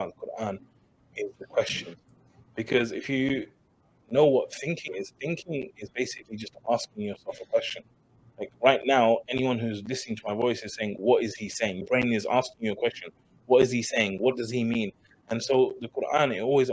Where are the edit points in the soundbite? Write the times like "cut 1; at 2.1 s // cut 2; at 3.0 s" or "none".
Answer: cut 1; at 3.9 s